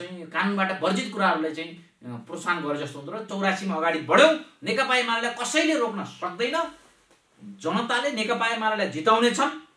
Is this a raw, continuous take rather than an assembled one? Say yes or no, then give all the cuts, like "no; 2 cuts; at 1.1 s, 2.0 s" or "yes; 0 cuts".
no; 1 cut; at 3.3 s